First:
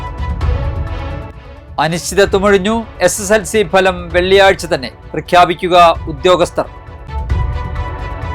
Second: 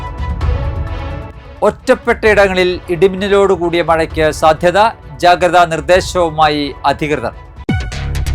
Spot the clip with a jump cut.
first; 1 cut; at 1.4 s

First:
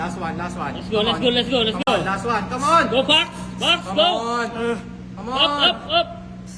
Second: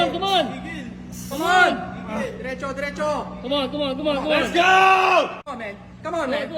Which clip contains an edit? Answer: second; 1 cut; at 5.4 s

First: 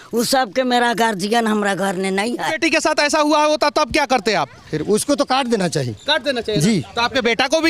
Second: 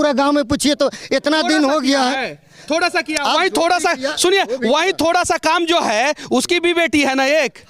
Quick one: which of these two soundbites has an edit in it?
first; 1 cut; at 2.5 s

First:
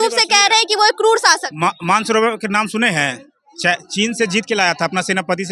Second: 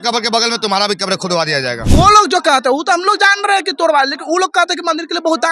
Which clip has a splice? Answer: second; 1 cut; at 1.9 s

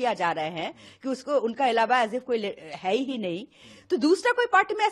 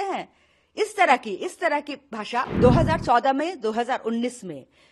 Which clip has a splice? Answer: second; 1 cut; at 2.5 s

